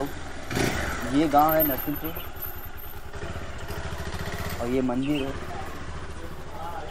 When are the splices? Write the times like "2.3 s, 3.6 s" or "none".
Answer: none